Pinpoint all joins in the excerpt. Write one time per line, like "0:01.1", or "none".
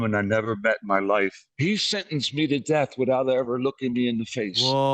0:01.5